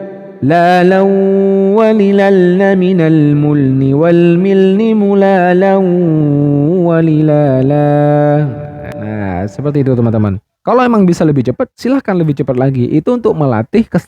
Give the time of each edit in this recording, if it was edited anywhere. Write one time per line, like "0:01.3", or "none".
0:08.9